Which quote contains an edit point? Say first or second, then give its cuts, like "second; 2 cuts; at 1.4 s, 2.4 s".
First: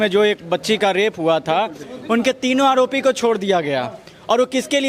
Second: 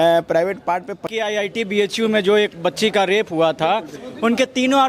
second; 1 cut; at 1.1 s